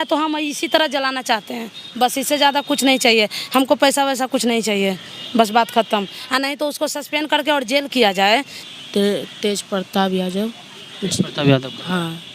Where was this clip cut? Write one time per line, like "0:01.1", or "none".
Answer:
0:08.6